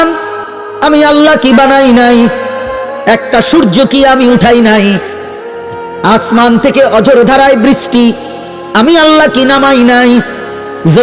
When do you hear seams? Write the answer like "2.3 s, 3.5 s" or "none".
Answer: none